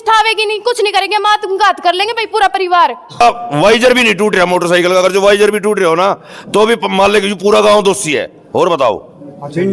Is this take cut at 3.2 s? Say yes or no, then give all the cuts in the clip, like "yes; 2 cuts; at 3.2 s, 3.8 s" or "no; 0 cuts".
yes; 1 cut; at 3.2 s